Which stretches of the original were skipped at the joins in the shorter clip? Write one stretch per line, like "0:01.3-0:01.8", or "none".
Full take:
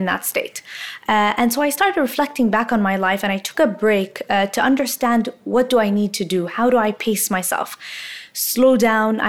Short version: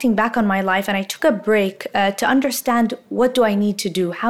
none

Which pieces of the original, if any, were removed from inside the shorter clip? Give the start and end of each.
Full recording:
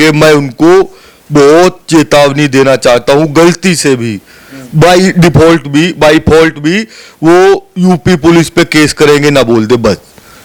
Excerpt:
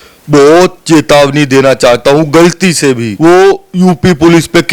0:04.1-0:07.1

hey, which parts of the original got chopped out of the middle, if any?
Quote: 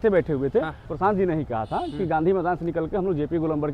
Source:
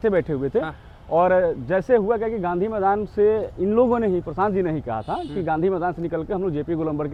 0:00.9-0:04.3

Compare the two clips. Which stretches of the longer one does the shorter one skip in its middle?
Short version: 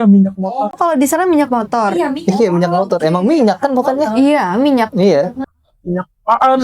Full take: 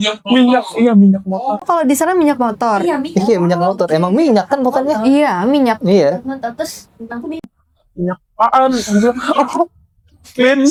0:06.4-0:07.6

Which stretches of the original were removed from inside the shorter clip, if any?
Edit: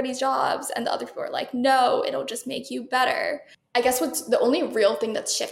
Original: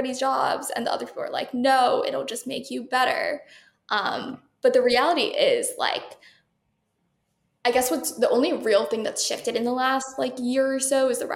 0:03.5-0:07.4

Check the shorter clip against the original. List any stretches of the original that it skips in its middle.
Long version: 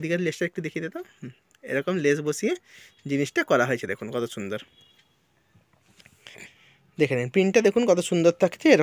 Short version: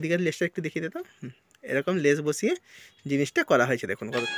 none

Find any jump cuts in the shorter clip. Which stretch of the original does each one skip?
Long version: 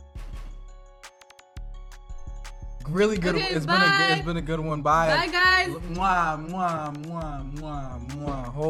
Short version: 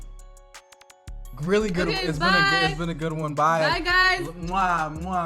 0:01.8-0:02.8

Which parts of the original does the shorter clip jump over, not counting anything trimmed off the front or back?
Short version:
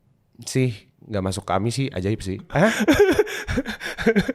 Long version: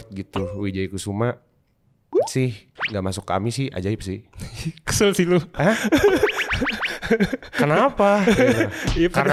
0:04.3-0:05.5

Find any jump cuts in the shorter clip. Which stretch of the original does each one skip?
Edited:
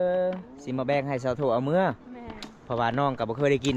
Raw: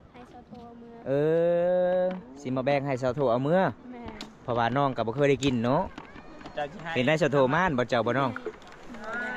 none

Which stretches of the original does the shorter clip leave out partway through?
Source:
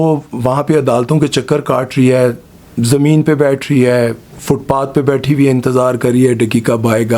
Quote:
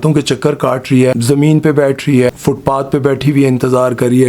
0:02.2-0:02.8
0:03.9-0:04.3

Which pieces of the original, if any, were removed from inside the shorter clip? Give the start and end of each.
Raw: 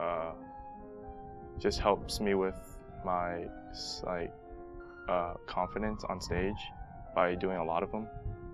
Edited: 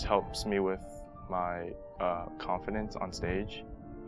0:03.6-0:04.9

